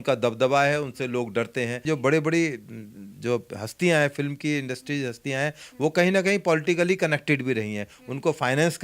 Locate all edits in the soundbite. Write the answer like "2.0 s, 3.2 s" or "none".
1.8 s